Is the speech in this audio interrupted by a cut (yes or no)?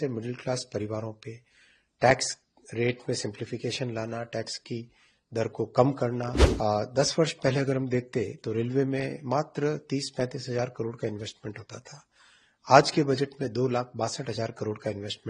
yes